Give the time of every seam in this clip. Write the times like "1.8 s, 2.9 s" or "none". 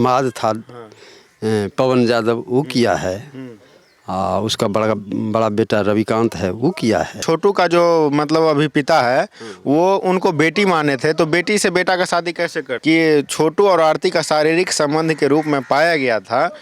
7.2 s, 12.7 s